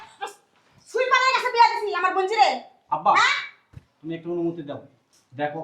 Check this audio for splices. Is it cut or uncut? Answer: uncut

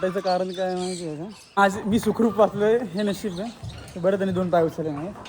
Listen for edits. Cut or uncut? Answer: cut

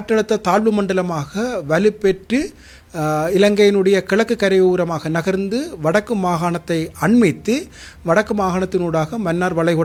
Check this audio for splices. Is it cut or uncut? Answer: uncut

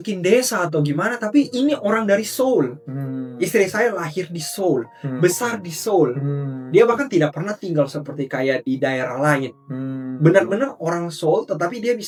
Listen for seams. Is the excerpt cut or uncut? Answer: uncut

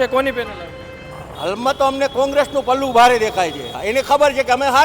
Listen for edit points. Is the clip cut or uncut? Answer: cut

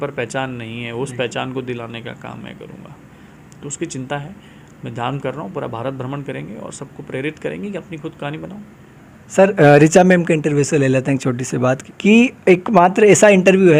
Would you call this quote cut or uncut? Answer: uncut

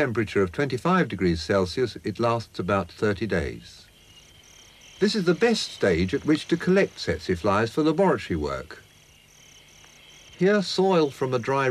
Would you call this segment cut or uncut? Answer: cut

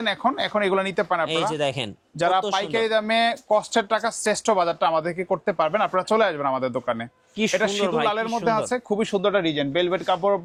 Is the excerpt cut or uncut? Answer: uncut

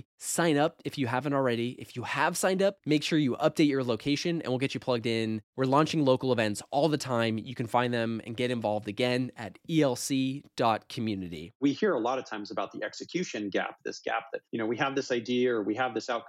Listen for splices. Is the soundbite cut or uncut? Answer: cut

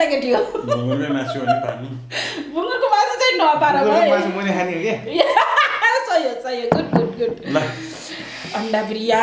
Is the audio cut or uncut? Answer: uncut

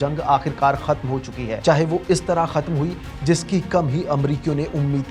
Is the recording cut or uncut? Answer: uncut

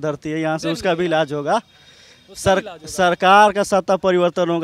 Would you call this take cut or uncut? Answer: uncut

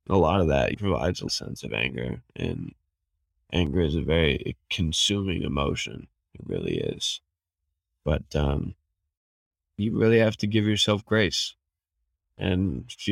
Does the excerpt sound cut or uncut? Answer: cut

